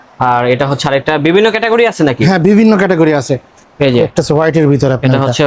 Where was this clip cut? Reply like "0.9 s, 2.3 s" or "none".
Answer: none